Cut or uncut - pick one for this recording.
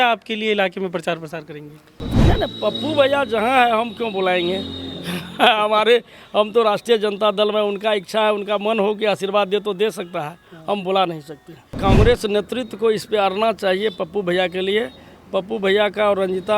cut